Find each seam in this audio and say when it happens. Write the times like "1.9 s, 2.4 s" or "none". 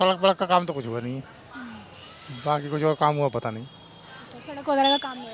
none